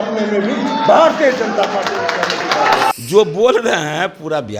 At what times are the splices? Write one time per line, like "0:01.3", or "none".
0:02.9